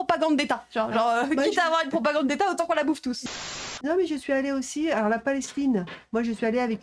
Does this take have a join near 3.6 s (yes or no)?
yes